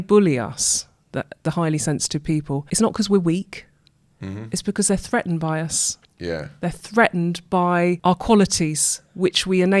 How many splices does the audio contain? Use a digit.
2